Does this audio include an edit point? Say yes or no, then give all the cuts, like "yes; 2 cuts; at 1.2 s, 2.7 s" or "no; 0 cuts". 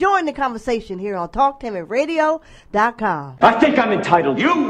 no; 0 cuts